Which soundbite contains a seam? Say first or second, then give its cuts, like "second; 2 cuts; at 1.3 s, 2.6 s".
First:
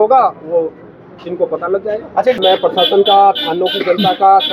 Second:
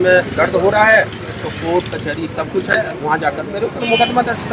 first; 1 cut; at 2.4 s